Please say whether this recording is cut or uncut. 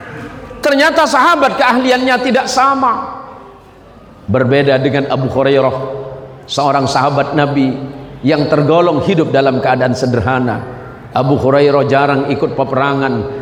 uncut